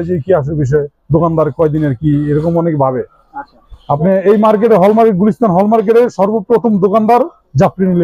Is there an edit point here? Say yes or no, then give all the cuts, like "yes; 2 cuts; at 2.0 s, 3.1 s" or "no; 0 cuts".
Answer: no; 0 cuts